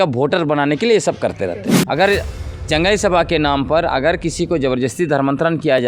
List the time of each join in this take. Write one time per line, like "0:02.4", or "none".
0:01.7